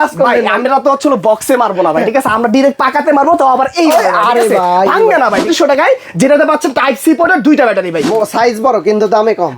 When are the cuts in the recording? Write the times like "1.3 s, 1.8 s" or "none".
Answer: 5.5 s, 8.0 s